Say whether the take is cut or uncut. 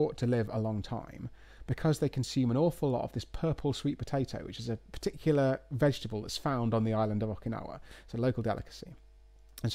uncut